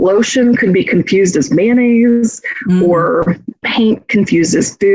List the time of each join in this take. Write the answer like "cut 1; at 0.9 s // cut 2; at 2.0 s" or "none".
cut 1; at 3.6 s